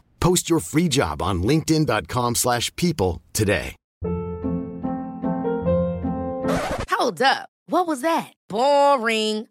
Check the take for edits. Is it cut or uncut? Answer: cut